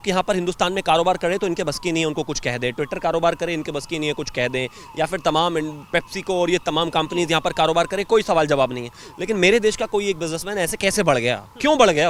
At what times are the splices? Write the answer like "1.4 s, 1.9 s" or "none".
none